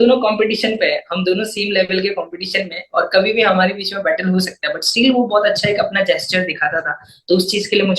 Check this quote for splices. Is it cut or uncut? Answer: uncut